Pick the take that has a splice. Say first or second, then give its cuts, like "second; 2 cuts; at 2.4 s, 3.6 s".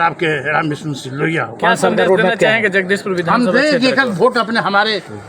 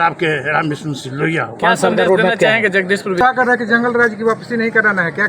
second; 1 cut; at 3.2 s